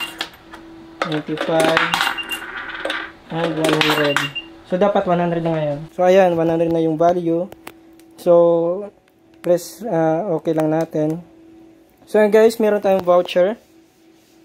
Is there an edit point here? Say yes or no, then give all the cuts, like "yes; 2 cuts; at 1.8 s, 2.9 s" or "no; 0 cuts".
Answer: no; 0 cuts